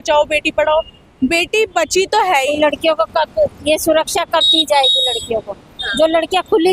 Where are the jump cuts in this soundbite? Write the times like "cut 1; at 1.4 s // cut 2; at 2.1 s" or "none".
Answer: cut 1; at 2.5 s